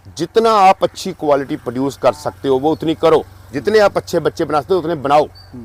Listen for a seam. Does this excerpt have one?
no; 0 cuts

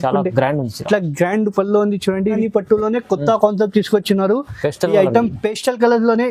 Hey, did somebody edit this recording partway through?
yes; 1 cut; at 2.4 s

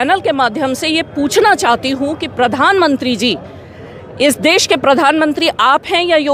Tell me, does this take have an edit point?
no; 0 cuts

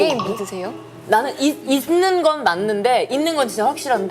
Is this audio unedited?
no; 1 cut; at 1.0 s

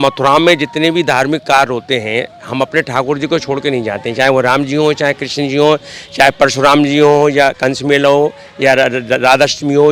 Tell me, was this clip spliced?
no; 0 cuts

